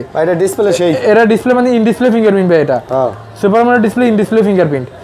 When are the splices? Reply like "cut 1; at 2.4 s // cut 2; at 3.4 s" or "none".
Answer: none